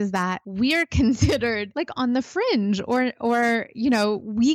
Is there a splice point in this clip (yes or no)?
no